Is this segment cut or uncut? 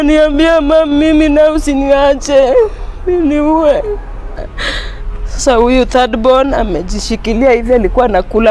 cut